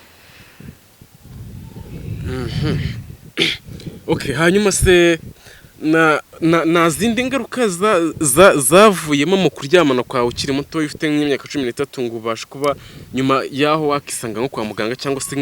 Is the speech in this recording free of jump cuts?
yes; 0 cuts

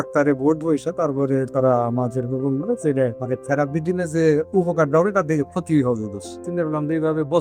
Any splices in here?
yes; 2 cuts; at 3.2 s, 6.4 s

